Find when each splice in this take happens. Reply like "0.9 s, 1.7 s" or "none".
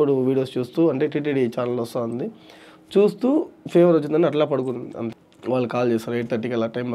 5.3 s